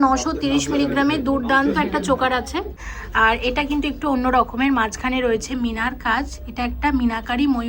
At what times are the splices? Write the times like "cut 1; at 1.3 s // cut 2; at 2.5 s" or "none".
cut 1; at 2.8 s